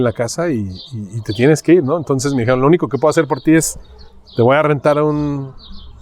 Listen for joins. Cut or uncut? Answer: uncut